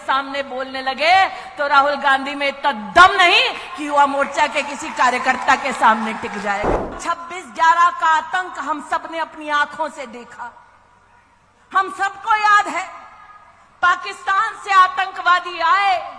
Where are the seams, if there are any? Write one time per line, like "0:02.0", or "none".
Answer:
0:07.0